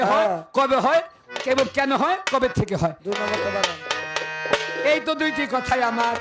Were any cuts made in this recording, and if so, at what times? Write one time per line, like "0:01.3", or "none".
none